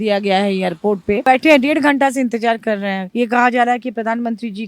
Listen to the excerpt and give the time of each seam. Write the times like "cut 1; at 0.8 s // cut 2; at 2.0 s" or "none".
cut 1; at 1.2 s // cut 2; at 3.0 s